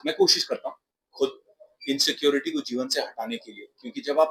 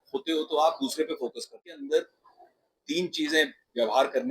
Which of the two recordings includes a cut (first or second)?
second